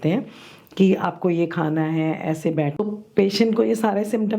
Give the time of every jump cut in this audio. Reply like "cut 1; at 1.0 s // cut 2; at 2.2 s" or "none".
cut 1; at 2.7 s